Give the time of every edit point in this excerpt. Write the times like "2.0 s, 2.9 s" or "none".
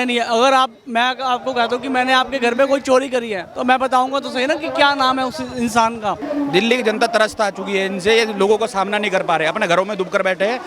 6.2 s

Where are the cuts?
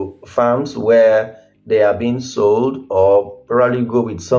none

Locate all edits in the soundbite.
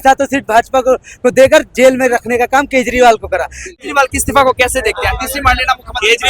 3.6 s

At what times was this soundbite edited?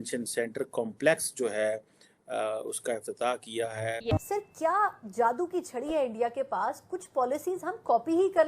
4.1 s

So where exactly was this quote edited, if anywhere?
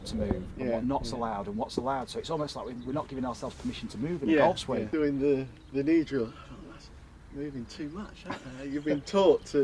4.9 s

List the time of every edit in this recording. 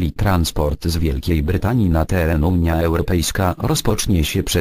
none

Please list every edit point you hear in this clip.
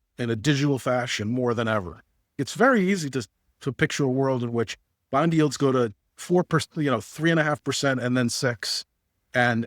2.4 s

